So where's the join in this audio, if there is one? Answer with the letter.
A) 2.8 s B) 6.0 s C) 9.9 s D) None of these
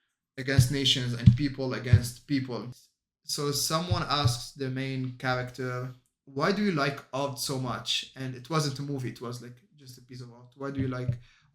A